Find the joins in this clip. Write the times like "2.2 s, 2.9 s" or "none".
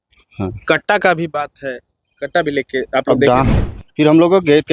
3.6 s